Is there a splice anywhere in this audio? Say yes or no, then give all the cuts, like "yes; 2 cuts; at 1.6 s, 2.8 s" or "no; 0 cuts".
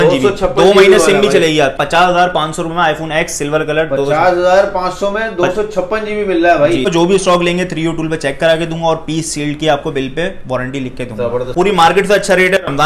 yes; 3 cuts; at 1.8 s, 6.9 s, 11.5 s